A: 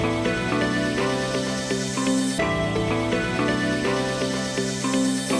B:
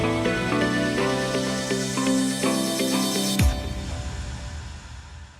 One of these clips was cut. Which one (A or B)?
B